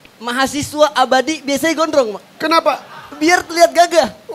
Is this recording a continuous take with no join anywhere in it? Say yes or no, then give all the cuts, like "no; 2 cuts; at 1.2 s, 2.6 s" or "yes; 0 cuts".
yes; 0 cuts